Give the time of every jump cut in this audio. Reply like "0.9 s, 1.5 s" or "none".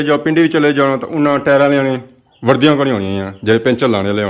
none